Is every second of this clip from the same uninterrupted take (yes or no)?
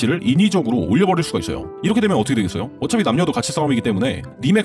yes